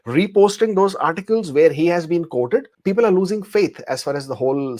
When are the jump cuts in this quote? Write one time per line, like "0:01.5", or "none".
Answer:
0:02.7